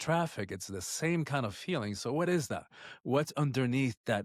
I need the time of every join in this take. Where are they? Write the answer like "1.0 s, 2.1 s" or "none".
none